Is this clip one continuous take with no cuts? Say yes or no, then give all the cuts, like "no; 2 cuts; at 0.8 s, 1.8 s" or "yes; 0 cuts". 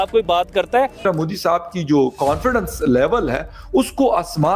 no; 1 cut; at 1.0 s